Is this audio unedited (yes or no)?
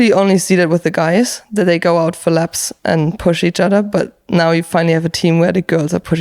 yes